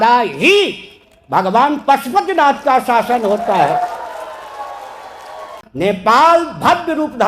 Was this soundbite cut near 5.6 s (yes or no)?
yes